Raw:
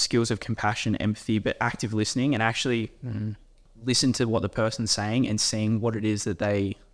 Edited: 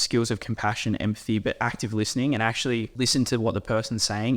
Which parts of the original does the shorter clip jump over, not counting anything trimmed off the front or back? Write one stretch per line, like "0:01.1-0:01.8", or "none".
0:02.9-0:03.8